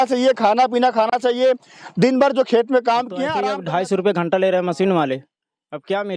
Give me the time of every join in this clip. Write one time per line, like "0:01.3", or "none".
0:03.3